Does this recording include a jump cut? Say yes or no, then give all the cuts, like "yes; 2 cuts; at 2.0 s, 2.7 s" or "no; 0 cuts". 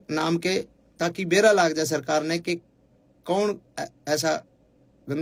no; 0 cuts